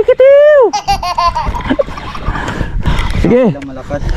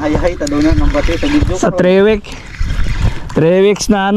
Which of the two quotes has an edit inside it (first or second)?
first